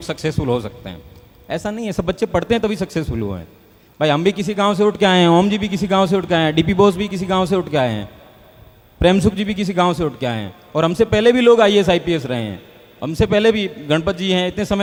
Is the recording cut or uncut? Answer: uncut